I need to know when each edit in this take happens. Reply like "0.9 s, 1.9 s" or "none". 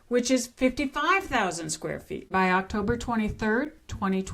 2.3 s